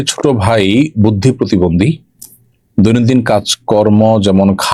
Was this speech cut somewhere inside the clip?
no; 0 cuts

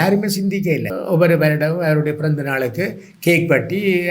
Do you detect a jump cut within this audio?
yes; 1 cut; at 0.9 s

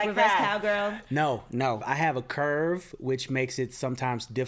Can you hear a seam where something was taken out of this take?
yes; 1 cut; at 1.8 s

